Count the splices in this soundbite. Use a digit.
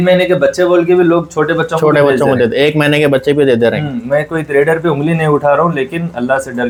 0